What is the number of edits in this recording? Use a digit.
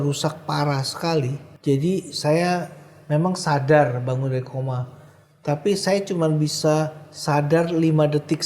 1